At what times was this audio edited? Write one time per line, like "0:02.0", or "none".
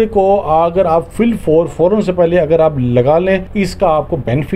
0:01.1
0:03.5